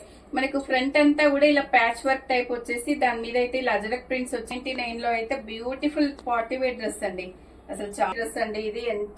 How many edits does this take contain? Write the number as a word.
two